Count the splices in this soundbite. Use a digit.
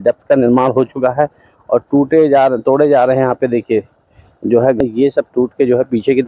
1